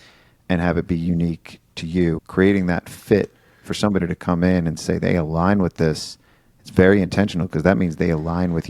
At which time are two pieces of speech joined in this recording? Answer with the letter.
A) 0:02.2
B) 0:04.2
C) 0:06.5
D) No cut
A